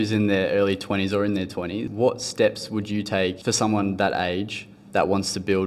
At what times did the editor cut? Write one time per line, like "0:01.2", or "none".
0:01.9
0:03.4